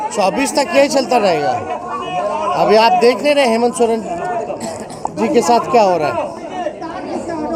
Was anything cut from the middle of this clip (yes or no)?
no